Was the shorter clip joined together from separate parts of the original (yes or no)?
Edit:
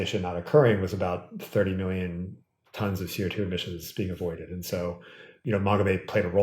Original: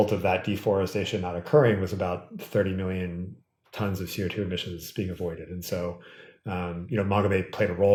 yes